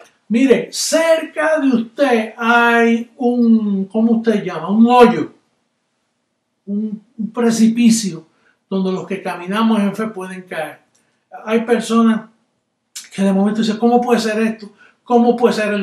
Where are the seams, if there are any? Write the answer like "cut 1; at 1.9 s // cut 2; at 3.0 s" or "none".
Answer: none